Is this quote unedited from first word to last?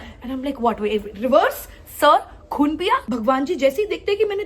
no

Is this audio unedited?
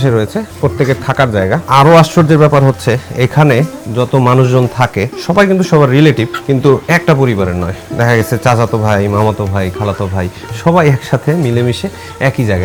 yes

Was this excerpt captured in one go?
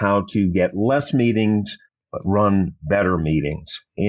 yes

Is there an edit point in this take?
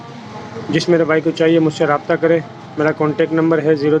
no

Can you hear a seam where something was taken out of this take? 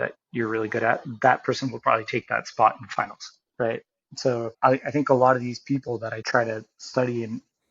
yes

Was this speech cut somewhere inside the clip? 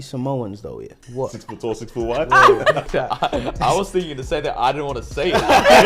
yes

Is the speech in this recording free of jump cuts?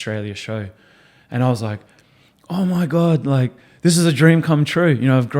yes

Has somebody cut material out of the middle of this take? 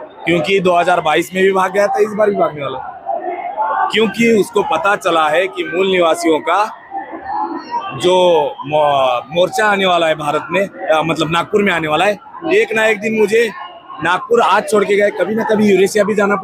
no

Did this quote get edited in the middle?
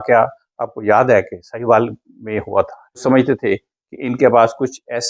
yes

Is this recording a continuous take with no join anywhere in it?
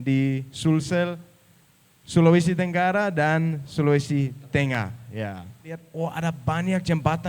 no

